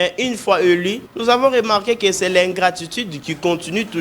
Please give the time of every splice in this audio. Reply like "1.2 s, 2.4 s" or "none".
1.0 s